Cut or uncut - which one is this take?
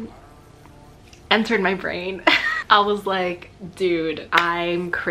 cut